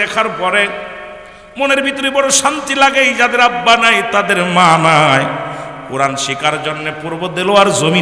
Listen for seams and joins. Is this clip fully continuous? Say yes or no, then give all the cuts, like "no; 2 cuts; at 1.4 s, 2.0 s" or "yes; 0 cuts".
yes; 0 cuts